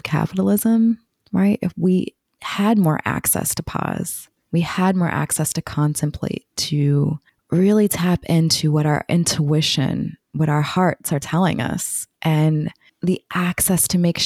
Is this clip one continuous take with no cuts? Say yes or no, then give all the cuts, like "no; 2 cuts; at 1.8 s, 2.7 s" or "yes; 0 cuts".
yes; 0 cuts